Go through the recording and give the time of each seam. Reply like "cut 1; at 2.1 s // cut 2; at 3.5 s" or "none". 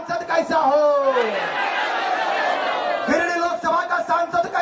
none